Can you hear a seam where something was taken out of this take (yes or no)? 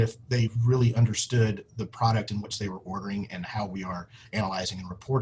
no